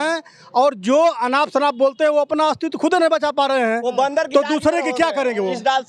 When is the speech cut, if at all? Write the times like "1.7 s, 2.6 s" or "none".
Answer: none